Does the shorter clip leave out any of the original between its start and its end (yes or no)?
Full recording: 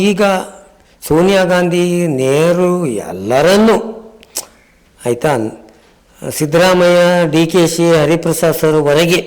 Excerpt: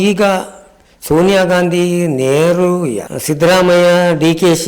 yes